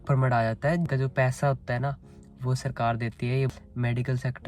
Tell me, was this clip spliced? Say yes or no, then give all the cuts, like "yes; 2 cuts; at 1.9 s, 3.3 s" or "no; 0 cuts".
yes; 2 cuts; at 0.9 s, 3.5 s